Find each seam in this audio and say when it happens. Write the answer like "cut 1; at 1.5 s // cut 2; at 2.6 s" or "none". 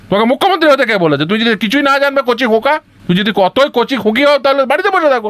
cut 1; at 2.9 s

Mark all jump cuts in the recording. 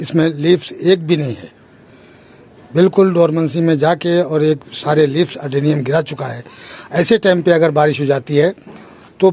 none

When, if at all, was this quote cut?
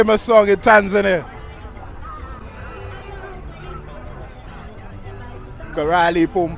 none

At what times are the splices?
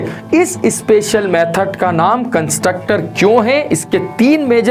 none

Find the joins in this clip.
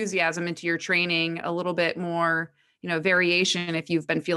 none

